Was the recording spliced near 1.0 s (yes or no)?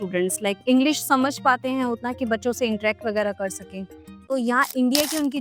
no